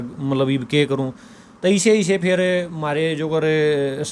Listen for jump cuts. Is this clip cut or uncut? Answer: uncut